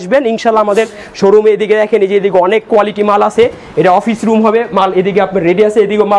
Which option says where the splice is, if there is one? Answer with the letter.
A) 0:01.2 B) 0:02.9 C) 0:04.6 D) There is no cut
D